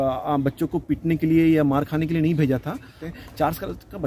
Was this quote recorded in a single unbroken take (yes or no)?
no